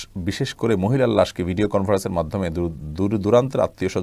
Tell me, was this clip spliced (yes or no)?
no